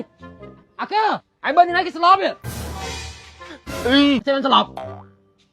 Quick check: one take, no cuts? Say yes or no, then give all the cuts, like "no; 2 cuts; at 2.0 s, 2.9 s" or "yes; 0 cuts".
no; 2 cuts; at 1.3 s, 4.2 s